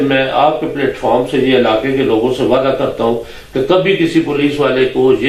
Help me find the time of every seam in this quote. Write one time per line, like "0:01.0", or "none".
none